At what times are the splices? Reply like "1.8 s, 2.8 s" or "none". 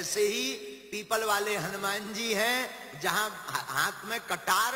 none